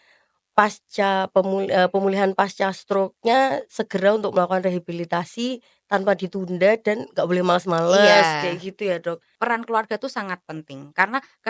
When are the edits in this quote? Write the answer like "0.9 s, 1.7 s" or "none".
9.3 s